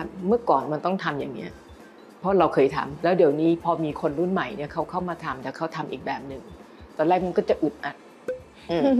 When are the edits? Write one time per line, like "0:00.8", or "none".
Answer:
0:02.9

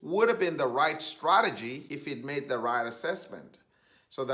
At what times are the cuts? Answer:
0:01.9

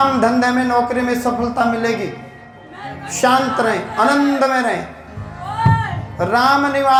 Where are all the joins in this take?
none

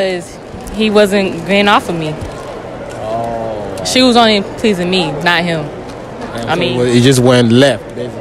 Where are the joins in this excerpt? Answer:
none

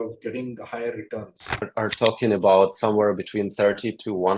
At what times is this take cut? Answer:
0:01.7

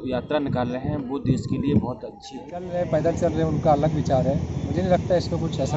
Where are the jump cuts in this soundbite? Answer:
0:02.7

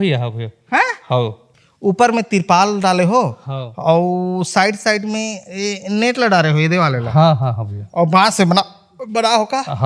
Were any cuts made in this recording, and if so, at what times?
0:01.5

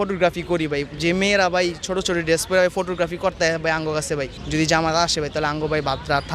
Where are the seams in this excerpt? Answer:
0:04.4

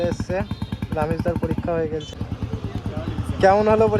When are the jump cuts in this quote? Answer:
0:02.1

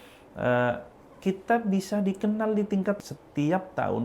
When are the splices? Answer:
0:03.0

